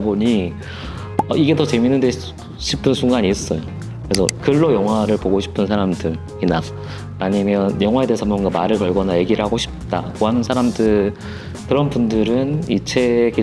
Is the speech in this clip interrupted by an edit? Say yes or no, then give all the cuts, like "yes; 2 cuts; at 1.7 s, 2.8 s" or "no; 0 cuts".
no; 0 cuts